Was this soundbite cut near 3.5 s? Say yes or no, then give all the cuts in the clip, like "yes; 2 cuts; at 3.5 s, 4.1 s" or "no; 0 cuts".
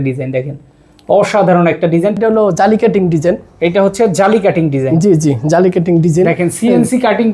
no; 1 cut; at 2.2 s